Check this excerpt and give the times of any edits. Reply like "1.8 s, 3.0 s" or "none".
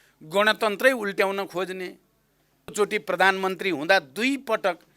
2.7 s